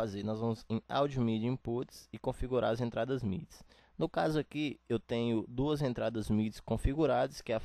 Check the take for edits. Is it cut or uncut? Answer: uncut